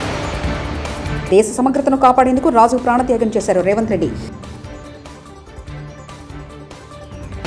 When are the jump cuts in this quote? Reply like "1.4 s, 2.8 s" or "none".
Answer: none